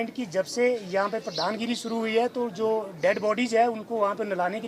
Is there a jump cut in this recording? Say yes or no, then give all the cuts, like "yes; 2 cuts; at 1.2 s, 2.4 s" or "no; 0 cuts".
no; 0 cuts